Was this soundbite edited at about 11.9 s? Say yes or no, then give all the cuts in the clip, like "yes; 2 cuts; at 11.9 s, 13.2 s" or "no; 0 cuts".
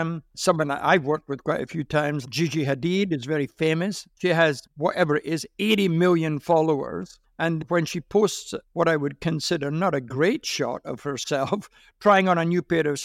no; 1 cut; at 4.4 s